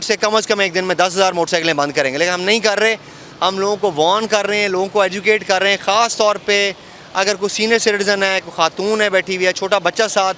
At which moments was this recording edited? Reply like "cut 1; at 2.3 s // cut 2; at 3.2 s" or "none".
none